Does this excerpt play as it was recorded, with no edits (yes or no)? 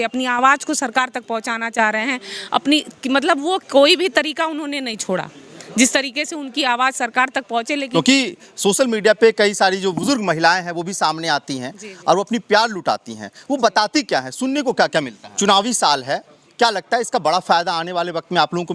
no